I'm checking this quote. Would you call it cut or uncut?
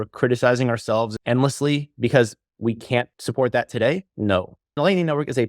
cut